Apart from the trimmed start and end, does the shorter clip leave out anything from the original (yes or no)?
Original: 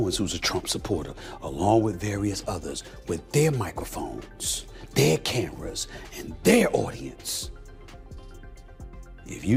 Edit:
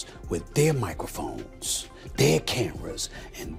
no